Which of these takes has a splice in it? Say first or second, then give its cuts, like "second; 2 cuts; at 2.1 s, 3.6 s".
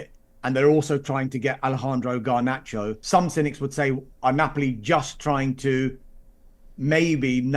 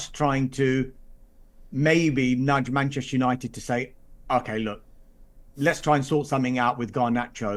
first; 1 cut; at 3.0 s